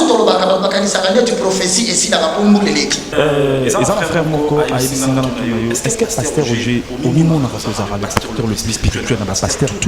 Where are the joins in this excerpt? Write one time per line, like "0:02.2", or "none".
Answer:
0:03.1